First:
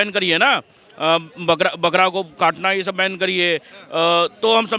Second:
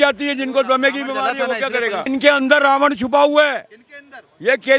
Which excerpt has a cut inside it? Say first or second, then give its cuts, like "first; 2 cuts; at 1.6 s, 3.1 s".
second; 1 cut; at 2.1 s